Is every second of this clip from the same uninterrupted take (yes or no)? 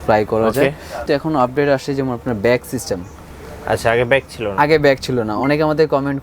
no